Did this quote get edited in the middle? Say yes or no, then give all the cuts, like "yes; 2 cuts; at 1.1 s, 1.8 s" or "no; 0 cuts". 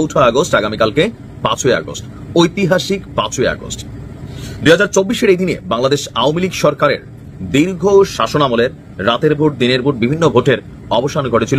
no; 0 cuts